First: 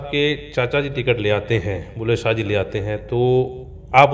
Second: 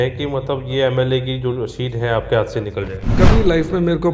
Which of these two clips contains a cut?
second; 1 cut; at 3.1 s

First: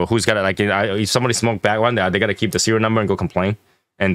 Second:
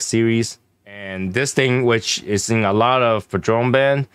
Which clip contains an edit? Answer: second; 1 cut; at 1.2 s

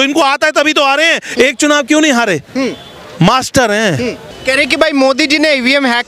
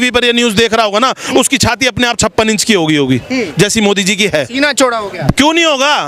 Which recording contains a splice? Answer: first; 1 cut; at 4.2 s

